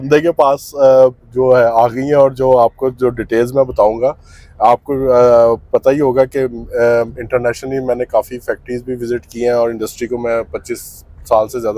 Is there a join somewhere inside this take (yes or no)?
no